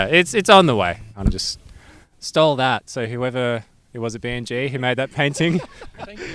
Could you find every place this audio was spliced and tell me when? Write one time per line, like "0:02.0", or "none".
0:01.1